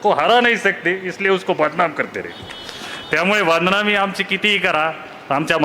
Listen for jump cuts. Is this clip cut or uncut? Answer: uncut